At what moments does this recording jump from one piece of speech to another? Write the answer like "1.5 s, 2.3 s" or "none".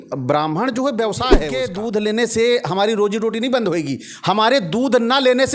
1.6 s